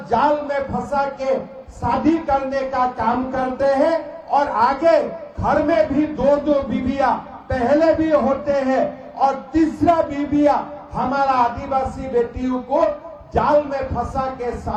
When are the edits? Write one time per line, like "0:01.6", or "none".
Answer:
none